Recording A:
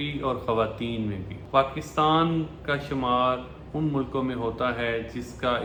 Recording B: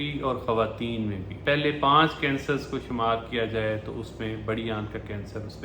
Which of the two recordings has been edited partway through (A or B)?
B